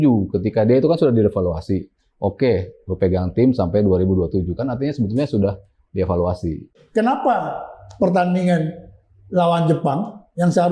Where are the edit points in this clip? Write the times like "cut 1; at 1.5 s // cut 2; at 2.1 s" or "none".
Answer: cut 1; at 6.6 s